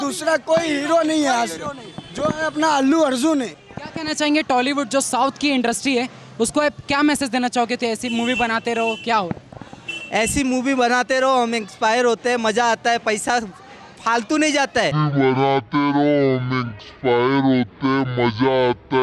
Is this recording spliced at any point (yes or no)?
no